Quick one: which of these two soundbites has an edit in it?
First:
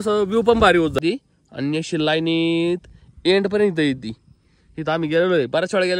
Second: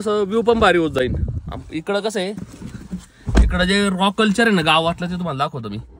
first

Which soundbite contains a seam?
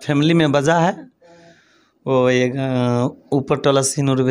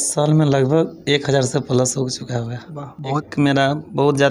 second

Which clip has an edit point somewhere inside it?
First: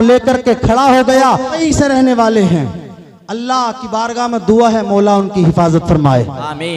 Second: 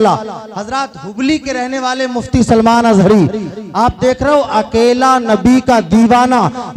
first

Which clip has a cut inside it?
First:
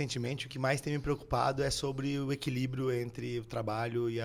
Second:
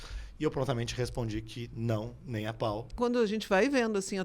second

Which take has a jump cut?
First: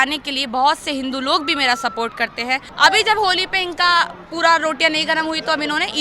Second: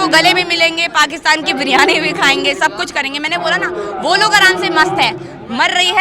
first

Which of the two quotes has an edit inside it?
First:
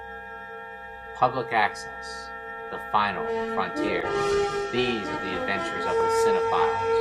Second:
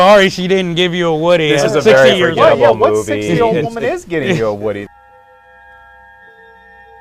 second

